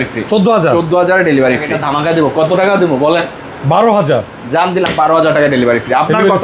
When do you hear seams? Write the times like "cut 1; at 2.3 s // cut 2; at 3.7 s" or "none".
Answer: cut 1; at 1.6 s